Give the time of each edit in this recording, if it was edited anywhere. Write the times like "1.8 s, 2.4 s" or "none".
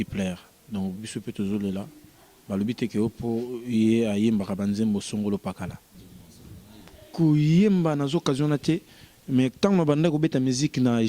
5.9 s